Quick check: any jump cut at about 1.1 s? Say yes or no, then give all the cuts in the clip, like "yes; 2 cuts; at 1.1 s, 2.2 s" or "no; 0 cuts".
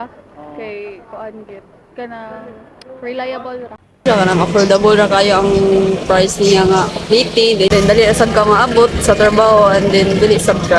no; 1 cut; at 4.0 s